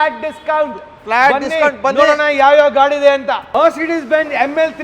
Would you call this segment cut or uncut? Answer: cut